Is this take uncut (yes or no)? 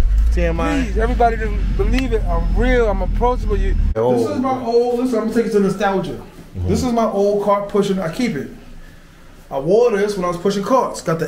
no